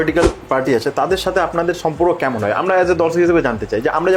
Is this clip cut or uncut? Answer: uncut